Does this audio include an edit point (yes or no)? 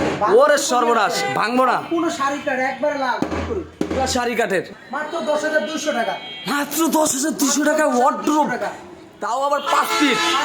yes